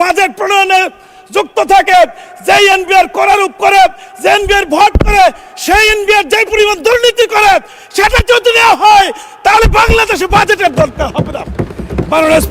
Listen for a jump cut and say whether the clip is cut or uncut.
uncut